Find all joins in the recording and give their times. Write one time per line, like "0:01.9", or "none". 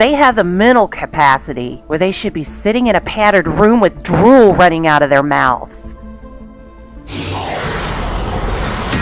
0:01.5